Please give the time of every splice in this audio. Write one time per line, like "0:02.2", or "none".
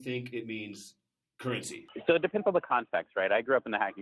0:01.8